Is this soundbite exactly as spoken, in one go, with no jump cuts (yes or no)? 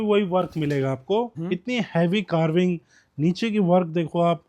no